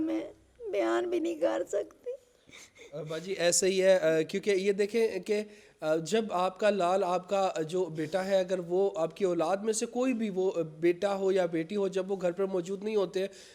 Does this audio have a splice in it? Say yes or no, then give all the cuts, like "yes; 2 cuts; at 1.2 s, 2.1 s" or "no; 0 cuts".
no; 0 cuts